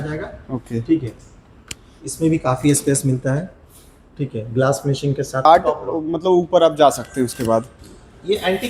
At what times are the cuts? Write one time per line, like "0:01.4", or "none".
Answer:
0:05.5